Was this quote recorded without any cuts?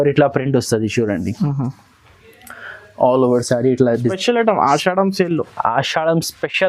no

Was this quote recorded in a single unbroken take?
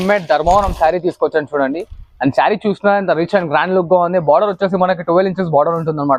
yes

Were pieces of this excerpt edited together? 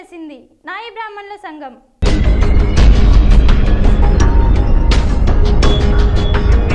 no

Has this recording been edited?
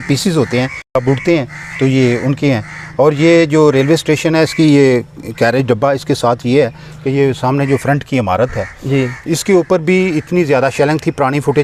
no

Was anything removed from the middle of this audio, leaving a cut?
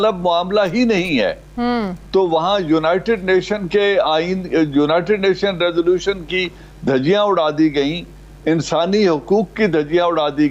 no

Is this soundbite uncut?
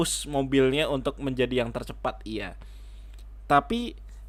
yes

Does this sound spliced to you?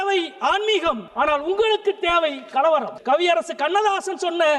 yes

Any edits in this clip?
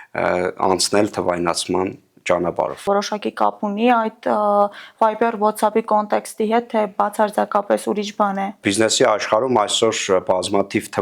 yes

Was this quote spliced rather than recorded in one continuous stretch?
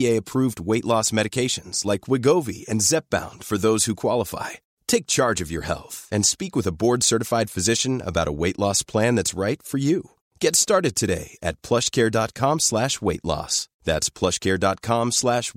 no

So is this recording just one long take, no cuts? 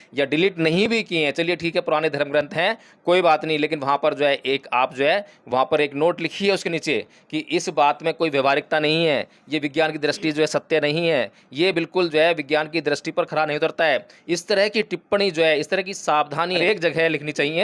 yes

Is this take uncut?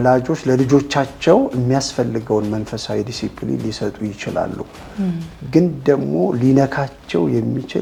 yes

